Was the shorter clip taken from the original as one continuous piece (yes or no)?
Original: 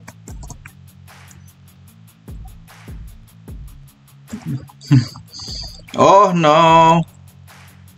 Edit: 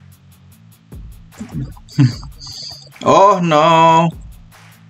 no